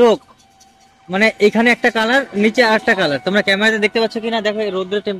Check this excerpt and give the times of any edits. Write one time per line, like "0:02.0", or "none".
none